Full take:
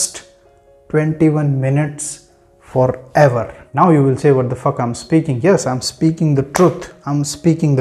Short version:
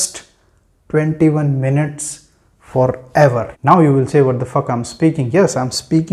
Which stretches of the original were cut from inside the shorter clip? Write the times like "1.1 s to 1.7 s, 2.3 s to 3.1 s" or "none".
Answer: 3.5 s to 3.6 s